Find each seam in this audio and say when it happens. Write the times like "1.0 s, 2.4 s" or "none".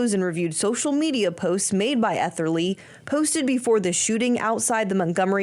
none